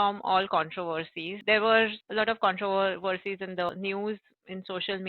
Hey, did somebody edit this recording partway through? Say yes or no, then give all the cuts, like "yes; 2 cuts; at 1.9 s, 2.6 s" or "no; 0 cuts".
yes; 3 cuts; at 1.4 s, 2.0 s, 3.7 s